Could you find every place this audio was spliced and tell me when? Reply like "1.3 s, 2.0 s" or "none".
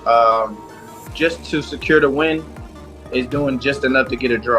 none